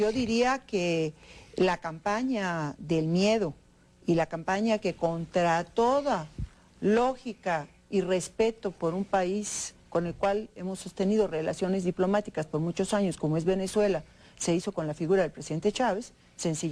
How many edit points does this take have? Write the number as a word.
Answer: one